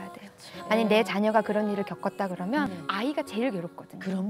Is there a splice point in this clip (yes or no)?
yes